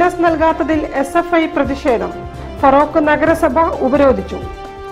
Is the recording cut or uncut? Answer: uncut